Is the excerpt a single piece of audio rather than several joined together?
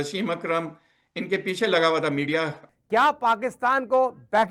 no; 1 cut; at 2.6 s

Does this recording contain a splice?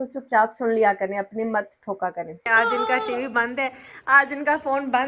yes; 1 cut; at 2.4 s

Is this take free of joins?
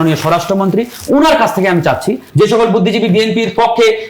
no; 1 cut; at 2.2 s

